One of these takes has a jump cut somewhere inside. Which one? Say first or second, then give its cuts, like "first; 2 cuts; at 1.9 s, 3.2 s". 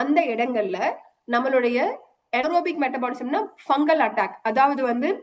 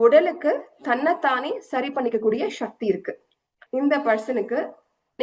second; 1 cut; at 3.6 s